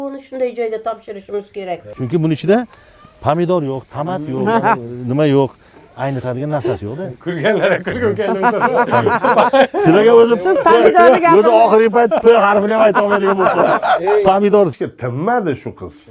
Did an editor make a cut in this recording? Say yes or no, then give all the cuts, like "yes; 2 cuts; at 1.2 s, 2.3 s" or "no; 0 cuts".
yes; 2 cuts; at 1.9 s, 14.7 s